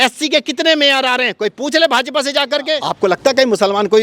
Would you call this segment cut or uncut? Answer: cut